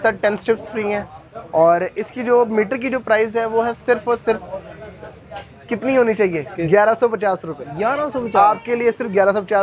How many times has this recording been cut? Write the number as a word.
zero